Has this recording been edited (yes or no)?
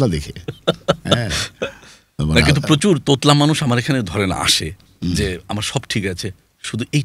no